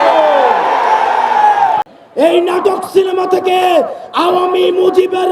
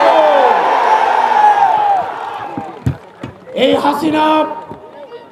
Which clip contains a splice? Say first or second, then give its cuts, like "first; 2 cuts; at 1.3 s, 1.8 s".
first; 1 cut; at 1.8 s